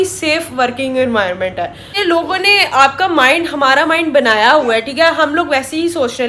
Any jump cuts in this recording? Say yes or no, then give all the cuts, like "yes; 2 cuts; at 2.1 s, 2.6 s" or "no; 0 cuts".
yes; 1 cut; at 1.9 s